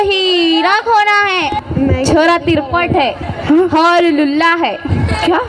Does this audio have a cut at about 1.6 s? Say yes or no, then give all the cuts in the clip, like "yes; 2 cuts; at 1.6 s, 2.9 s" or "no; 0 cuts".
yes; 1 cut; at 1.6 s